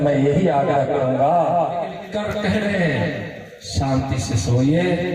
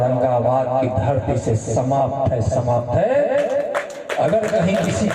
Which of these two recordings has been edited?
first; 1 cut; at 2.0 s

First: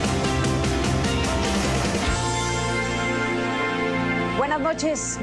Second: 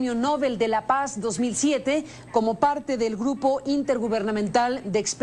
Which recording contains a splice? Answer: second; 1 cut; at 4.2 s

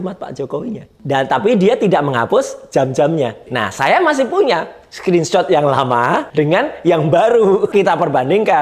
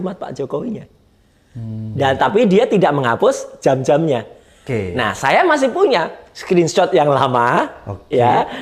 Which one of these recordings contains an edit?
first; 4 cuts; at 0.9 s, 3.5 s, 6.3 s, 7.7 s

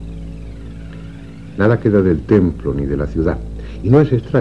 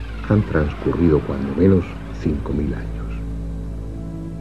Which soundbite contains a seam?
second; 1 cut; at 1.0 s

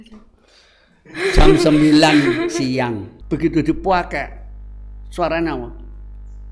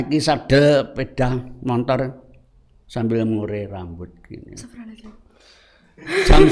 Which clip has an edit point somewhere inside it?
first; 1 cut; at 3.1 s

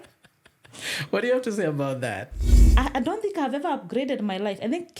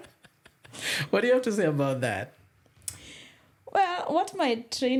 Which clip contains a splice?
first; 1 cut; at 2.6 s

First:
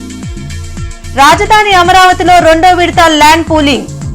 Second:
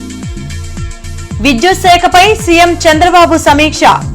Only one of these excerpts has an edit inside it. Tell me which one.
second; 1 cut; at 0.9 s

